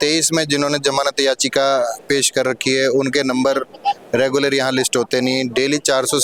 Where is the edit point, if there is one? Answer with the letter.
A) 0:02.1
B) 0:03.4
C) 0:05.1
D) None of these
D